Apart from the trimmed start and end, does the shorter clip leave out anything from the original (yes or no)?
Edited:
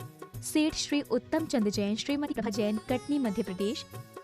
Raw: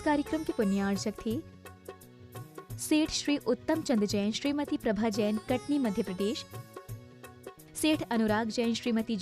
yes